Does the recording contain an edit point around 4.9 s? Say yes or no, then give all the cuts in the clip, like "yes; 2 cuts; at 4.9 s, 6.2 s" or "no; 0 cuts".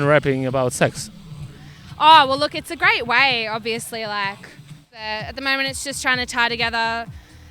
yes; 1 cut; at 4.9 s